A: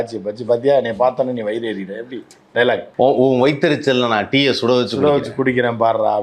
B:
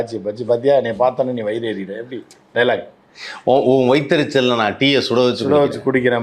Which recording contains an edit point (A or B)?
A